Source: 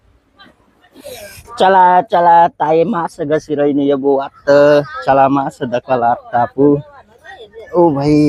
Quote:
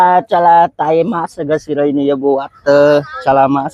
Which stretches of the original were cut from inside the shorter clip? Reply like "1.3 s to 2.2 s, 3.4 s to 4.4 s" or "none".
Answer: none